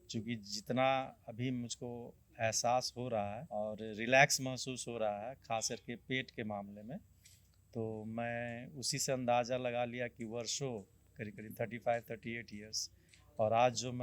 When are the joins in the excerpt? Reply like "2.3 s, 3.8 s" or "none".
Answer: 3.4 s